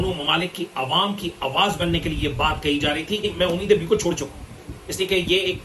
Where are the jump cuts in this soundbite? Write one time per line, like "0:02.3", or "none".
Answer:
0:03.2